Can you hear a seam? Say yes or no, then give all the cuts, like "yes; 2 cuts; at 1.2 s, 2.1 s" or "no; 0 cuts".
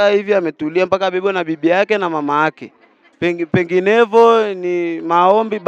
no; 0 cuts